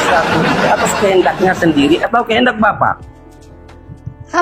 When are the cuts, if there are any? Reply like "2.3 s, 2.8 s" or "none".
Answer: none